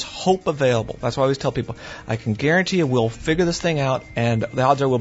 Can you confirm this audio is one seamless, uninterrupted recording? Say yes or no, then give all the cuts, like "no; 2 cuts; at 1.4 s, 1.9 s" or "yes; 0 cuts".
yes; 0 cuts